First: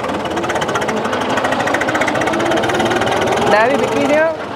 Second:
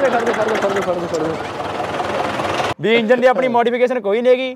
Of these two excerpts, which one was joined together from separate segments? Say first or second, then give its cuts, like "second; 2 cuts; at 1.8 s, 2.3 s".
second; 1 cut; at 2.7 s